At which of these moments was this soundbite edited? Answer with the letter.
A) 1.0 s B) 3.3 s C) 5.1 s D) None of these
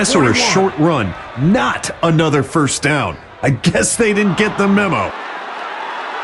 C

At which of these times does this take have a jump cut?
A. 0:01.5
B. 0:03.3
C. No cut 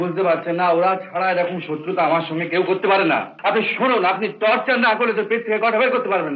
B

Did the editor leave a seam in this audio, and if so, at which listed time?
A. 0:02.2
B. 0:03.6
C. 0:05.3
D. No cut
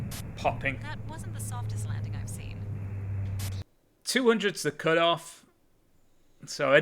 B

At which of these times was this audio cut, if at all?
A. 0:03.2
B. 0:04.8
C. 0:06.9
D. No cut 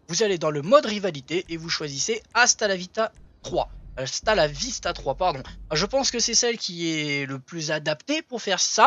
C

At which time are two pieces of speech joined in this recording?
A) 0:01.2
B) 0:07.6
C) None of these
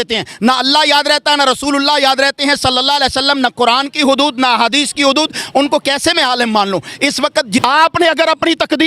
B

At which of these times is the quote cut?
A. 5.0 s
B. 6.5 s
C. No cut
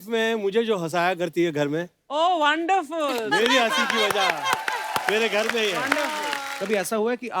B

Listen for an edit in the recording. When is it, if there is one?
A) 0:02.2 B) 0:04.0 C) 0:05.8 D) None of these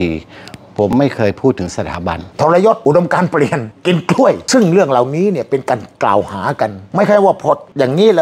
A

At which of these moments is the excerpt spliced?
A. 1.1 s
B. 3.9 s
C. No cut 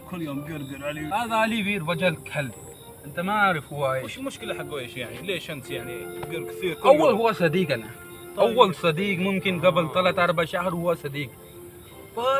A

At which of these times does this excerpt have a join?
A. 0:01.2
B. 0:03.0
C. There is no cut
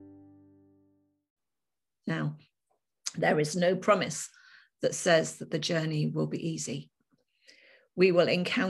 A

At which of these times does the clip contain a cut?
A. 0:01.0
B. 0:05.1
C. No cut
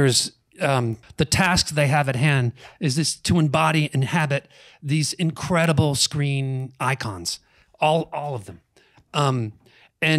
A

